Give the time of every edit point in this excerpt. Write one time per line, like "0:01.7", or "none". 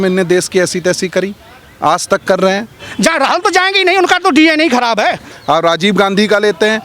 0:02.9
0:05.3